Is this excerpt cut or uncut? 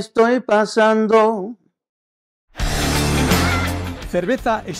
cut